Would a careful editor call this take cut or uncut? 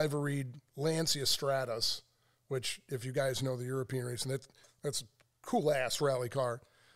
uncut